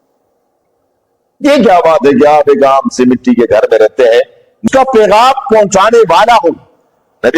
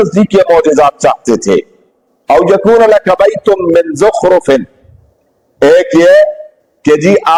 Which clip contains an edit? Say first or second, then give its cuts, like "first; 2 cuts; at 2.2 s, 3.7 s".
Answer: first; 1 cut; at 4.6 s